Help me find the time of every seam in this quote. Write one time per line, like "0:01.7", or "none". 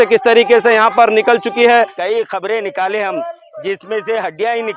0:02.0